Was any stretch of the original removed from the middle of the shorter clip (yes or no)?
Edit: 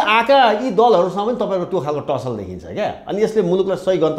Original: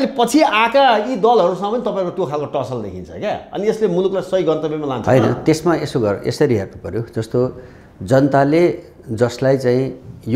no